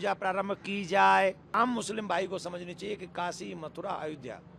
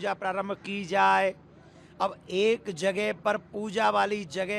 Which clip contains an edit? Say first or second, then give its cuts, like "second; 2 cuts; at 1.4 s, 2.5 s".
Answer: first; 1 cut; at 1.5 s